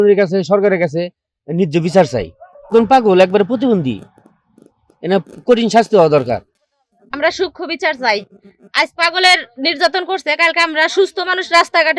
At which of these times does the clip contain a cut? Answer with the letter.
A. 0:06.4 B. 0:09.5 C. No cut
A